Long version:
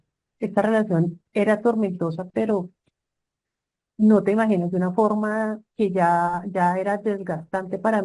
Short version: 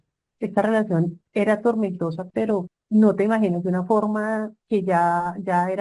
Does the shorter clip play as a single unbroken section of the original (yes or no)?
no